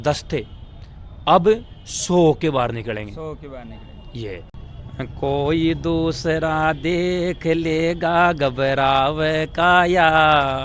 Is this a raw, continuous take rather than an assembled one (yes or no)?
no